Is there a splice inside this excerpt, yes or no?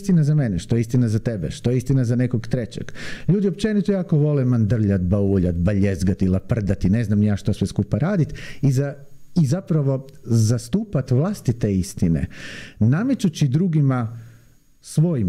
no